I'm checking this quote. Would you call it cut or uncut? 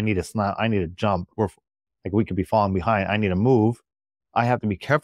cut